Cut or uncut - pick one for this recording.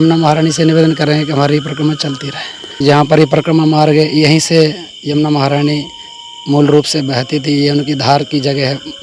cut